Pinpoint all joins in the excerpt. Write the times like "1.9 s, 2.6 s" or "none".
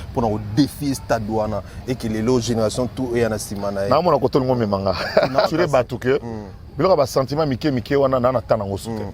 5.5 s